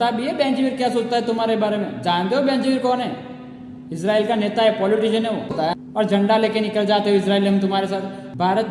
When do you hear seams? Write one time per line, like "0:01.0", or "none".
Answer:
0:05.6